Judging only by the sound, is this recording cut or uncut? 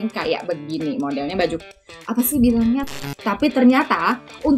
cut